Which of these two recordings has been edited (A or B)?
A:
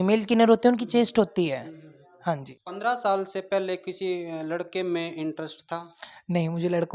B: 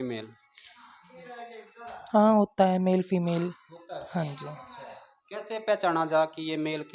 A